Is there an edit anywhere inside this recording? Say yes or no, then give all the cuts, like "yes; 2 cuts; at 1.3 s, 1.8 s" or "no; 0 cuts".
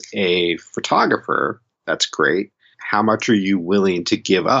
yes; 2 cuts; at 1.7 s, 2.8 s